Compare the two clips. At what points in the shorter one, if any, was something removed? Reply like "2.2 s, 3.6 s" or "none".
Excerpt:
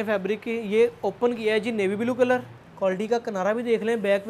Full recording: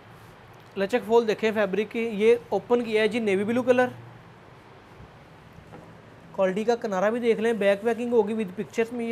2.6 s